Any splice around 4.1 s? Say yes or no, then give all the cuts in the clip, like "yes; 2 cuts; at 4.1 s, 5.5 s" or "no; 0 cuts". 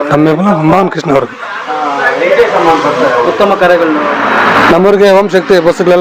yes; 1 cut; at 4.1 s